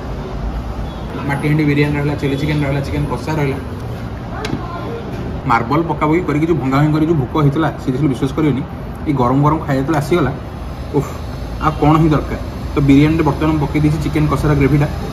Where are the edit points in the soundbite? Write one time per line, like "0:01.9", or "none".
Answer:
0:01.0
0:03.8
0:05.4